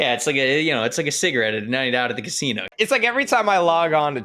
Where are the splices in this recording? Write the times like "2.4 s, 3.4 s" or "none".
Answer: 2.7 s